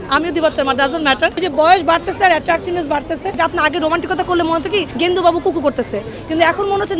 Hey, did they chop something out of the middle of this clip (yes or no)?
yes